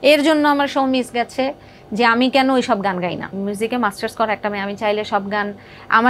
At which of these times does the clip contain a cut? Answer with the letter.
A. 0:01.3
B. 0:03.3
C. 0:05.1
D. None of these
B